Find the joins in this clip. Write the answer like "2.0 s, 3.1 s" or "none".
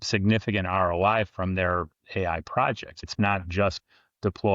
3.0 s